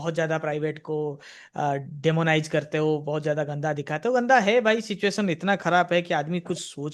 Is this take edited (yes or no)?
no